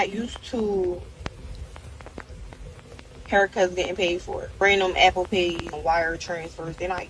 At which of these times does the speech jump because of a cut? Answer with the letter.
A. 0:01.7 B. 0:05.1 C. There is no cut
B